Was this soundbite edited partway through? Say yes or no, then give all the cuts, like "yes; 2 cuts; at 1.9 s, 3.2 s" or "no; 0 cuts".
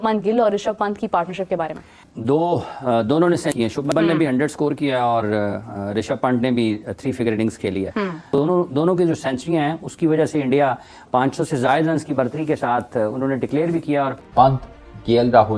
yes; 2 cuts; at 8.3 s, 14.2 s